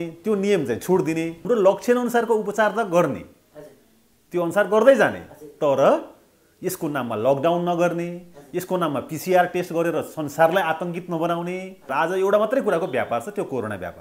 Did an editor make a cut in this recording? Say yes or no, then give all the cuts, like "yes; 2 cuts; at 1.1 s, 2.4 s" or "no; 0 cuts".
yes; 2 cuts; at 1.4 s, 11.9 s